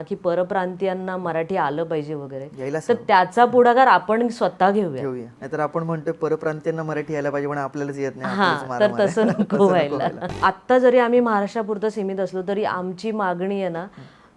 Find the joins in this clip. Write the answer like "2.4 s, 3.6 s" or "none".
5.3 s, 10.3 s